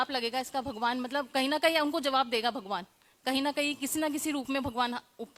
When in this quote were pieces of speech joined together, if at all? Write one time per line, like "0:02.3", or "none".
none